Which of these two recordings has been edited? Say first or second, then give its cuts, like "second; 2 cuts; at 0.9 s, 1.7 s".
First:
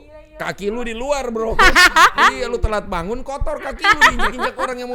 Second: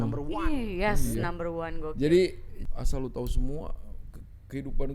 second; 1 cut; at 2.5 s